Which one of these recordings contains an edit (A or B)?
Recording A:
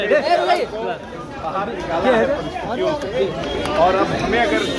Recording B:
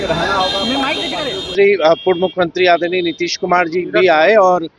B